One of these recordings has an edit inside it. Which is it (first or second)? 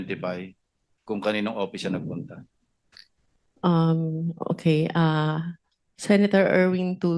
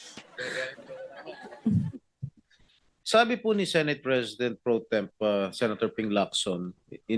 second